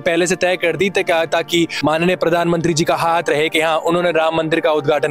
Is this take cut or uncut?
uncut